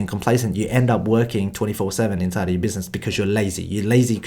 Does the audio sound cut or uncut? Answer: uncut